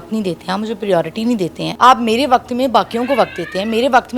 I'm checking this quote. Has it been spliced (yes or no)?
yes